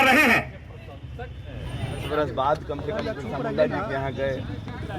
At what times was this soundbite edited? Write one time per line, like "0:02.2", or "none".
0:02.0